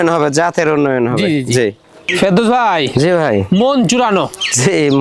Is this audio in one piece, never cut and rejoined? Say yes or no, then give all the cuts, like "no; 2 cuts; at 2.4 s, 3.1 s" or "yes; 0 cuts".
yes; 0 cuts